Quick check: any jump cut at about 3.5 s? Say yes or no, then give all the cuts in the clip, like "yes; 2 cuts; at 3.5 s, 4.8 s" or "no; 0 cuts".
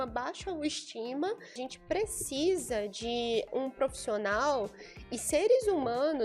yes; 2 cuts; at 1.6 s, 3.5 s